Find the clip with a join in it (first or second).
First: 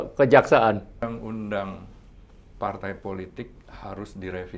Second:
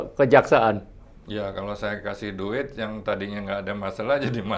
first